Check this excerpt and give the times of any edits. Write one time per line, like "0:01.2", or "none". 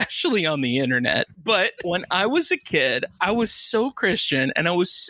0:01.8
0:03.1